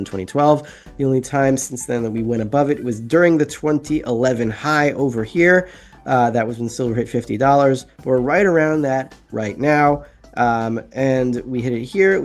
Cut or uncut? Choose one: uncut